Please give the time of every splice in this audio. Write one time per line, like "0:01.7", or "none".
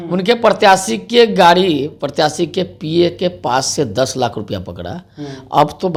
none